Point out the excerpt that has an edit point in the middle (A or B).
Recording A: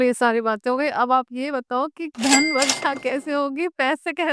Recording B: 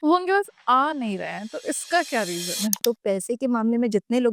B